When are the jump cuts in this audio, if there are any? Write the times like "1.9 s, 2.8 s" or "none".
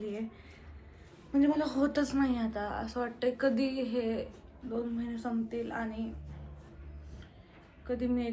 none